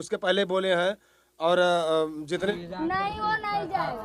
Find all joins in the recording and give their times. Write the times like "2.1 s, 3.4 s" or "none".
2.5 s